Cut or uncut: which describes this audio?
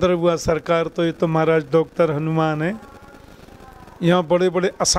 uncut